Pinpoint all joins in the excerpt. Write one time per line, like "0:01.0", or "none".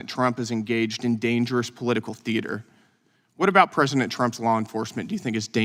none

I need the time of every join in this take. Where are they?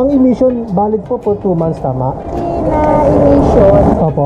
none

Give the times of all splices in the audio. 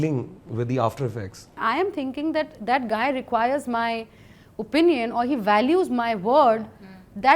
0:01.5

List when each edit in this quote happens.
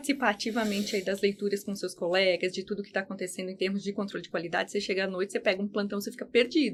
none

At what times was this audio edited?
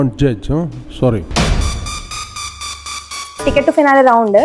0:03.4

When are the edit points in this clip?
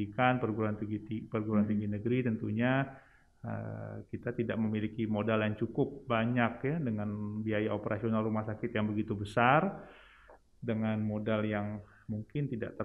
none

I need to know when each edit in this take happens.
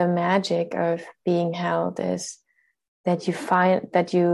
none

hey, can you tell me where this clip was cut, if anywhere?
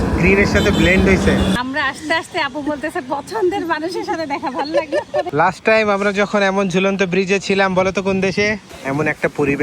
0:01.6
0:05.3
0:08.7

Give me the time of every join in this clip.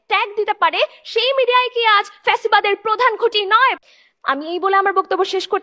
0:03.8

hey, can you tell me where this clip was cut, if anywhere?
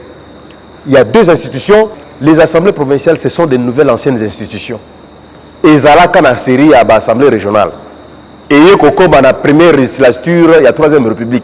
0:02.0

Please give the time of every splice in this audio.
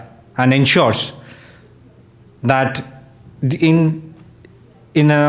0:01.1

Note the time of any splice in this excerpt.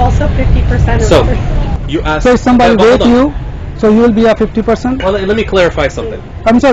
none

